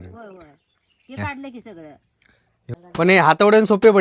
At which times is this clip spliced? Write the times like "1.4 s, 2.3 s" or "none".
2.7 s